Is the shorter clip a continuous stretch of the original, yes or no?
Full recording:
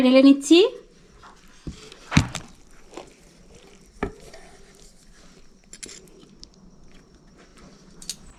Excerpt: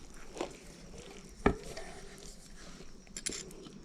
yes